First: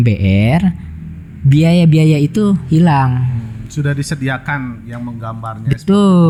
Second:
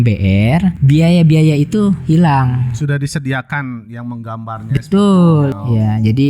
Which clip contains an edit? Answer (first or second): second